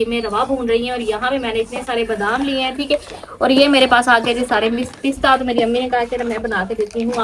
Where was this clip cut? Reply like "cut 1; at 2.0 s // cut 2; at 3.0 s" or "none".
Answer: none